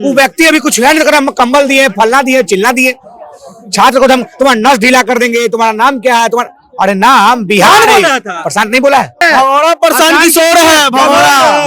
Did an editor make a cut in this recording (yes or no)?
yes